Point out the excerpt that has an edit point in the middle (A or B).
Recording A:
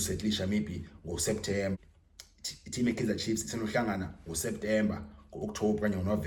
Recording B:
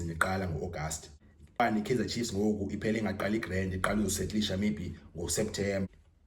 B